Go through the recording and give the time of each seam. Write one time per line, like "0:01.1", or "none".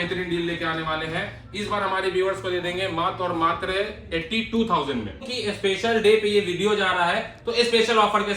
0:05.3